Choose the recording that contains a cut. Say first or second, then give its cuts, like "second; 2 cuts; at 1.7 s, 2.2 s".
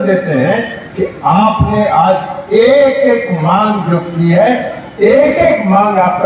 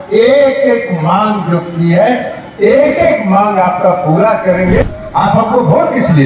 second; 1 cut; at 4.8 s